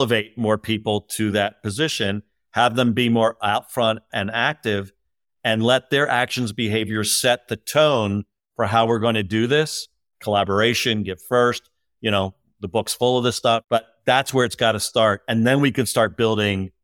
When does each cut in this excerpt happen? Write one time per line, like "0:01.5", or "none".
0:13.6